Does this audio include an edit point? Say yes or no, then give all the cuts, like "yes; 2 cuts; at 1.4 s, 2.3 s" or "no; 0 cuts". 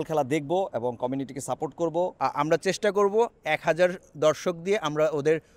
yes; 1 cut; at 2.1 s